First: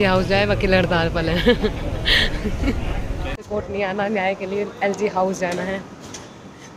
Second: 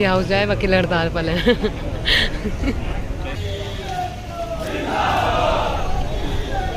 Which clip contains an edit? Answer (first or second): second